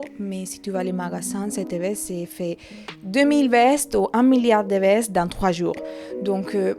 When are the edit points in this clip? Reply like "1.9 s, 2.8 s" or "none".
none